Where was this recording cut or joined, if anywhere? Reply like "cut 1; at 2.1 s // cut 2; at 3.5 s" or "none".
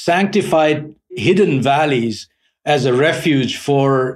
cut 1; at 1.1 s